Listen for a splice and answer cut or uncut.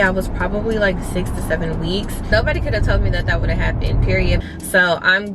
cut